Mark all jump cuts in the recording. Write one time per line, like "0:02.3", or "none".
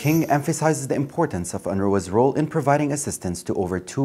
none